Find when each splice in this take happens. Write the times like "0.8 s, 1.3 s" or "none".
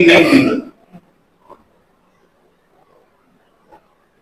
none